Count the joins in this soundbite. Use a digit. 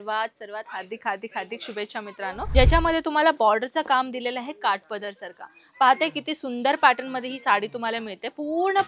1